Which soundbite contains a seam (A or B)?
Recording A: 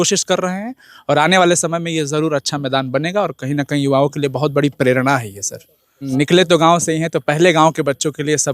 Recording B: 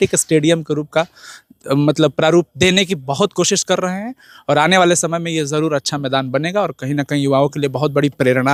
A